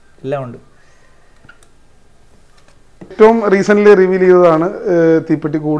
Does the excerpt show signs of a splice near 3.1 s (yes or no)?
yes